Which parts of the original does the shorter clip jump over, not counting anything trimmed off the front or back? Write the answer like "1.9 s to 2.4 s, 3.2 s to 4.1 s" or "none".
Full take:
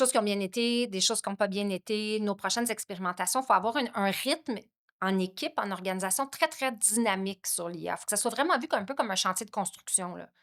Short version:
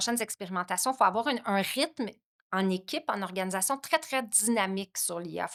none

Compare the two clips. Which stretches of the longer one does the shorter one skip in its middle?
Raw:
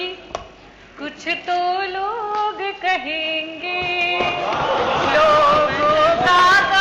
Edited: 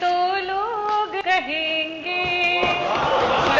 2.7 s to 2.8 s

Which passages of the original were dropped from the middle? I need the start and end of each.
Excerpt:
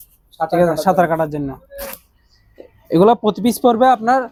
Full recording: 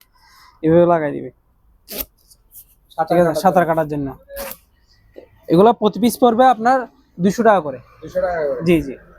none

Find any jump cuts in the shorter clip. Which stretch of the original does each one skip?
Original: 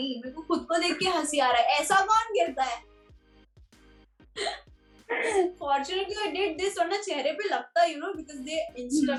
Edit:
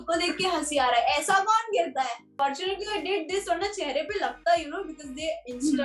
2.9 s to 5.6 s

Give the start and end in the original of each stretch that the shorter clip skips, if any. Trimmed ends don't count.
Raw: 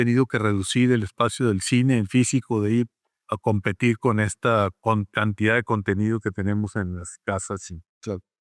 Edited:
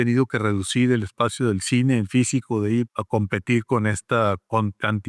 3.0 s to 3.3 s

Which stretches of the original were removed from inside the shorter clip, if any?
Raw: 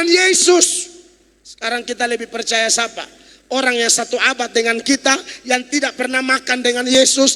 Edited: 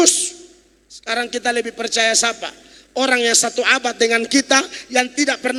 none

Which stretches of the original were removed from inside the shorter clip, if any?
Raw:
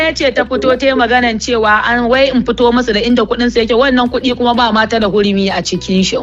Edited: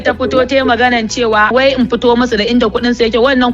1.8 s to 2.1 s

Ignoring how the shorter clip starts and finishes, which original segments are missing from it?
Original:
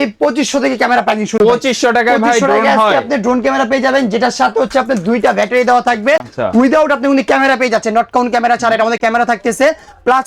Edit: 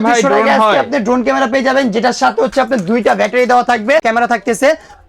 6.2 s to 9.0 s

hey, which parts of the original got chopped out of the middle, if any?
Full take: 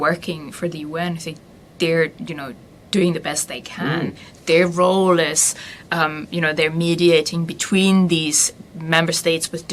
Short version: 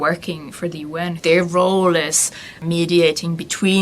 1.2 s to 4.4 s, 5.9 s to 6.7 s

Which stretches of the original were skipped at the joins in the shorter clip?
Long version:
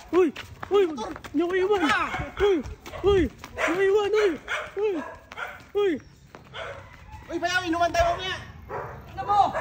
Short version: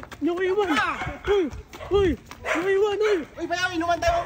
4.4 s to 7.2 s

